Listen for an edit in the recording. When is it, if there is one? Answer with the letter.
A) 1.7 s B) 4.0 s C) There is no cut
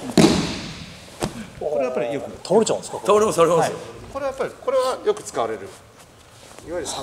C